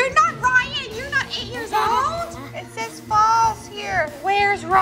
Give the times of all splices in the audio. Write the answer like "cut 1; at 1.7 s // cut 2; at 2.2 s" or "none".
cut 1; at 2.4 s